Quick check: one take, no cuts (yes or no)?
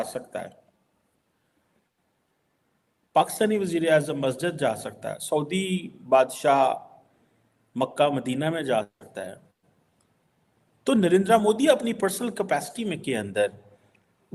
yes